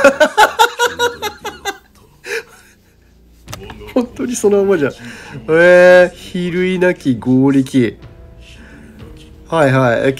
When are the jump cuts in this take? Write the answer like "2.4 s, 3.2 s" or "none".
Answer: none